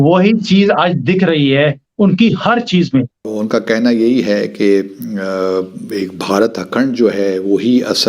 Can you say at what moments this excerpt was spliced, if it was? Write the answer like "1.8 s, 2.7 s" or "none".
3.3 s

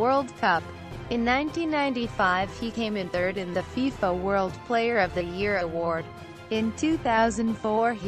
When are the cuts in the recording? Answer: 3.7 s

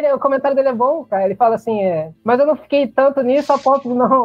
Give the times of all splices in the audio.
1.1 s, 2.1 s

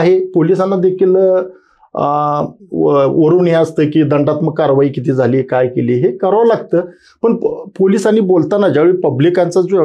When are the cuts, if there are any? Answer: none

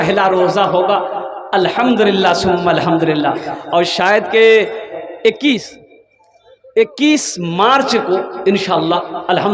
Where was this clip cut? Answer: 5.0 s

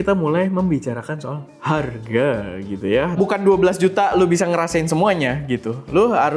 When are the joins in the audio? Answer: 3.2 s

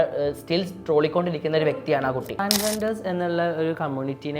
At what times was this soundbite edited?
2.4 s

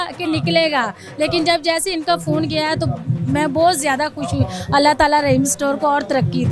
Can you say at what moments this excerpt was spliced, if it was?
none

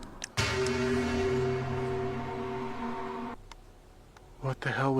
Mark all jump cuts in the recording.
3.5 s

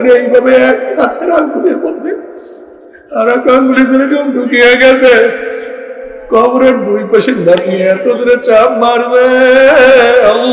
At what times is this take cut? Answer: none

